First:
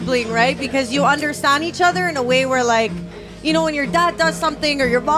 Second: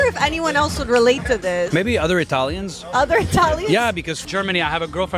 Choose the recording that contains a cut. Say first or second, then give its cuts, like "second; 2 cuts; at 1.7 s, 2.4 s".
second; 2 cuts; at 1.7 s, 4.2 s